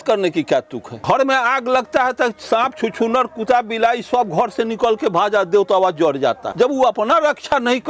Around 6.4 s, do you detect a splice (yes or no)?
yes